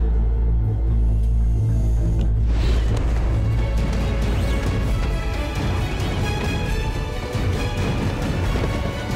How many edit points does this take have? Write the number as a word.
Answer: zero